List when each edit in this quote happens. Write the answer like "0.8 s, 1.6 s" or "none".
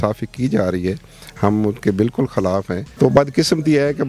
2.8 s